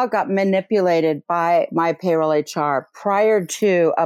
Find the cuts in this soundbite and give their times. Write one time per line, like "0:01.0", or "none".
none